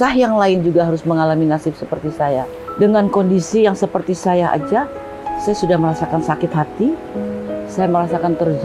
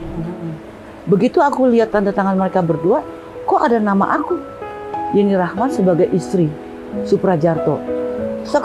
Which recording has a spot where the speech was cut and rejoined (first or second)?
first